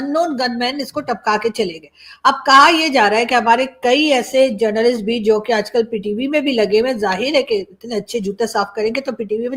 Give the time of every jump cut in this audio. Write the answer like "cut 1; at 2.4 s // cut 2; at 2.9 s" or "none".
none